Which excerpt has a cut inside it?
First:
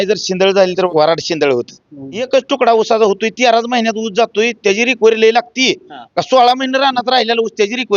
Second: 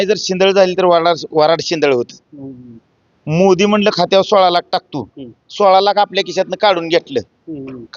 first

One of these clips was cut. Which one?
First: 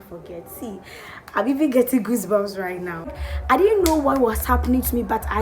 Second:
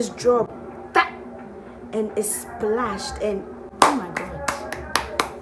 first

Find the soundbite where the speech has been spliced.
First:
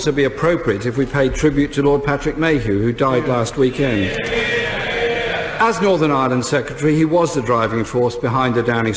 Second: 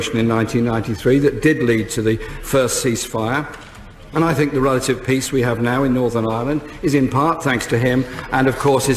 second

